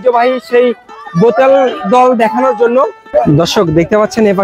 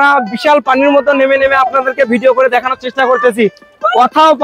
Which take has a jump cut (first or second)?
first